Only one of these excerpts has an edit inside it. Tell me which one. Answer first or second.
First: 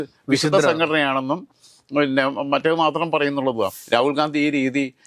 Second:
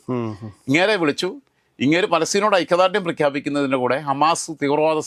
first